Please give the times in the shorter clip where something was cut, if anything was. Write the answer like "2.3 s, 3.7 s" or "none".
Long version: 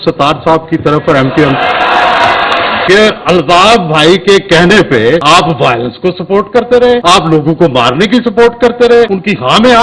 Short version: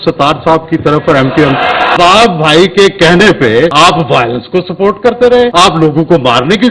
1.9 s